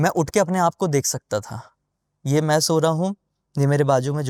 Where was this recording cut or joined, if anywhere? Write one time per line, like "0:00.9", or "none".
none

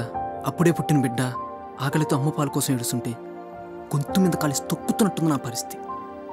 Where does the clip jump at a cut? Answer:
0:05.4

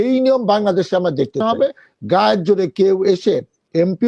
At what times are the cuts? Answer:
0:01.4

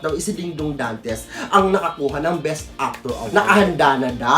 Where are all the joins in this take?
0:03.3

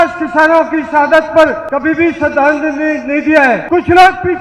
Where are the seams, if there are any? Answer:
0:01.6
0:03.6

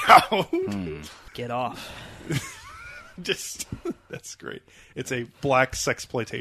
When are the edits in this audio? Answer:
0:01.2

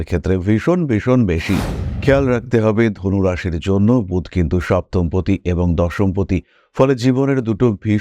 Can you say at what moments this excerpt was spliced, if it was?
0:01.7

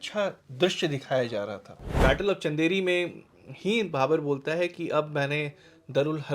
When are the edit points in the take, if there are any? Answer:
0:02.0

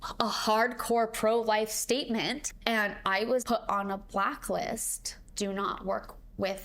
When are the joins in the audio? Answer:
0:02.4
0:03.4
0:05.2

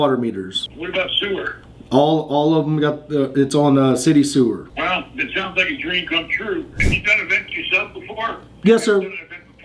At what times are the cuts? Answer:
0:06.9

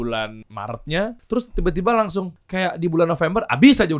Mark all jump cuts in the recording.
0:01.0
0:02.4

